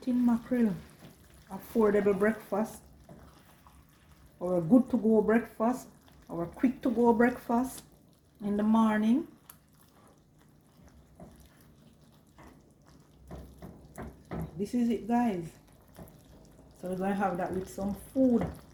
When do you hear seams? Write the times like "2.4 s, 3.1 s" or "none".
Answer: none